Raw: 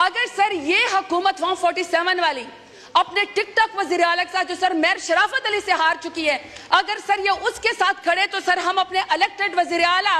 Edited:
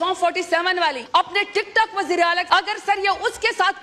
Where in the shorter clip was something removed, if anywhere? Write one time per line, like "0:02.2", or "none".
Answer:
0:01.0
0:02.4